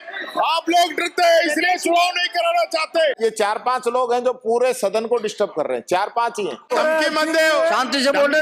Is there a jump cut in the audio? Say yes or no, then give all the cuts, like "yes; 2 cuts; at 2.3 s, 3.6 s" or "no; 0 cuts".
yes; 2 cuts; at 3.1 s, 6.7 s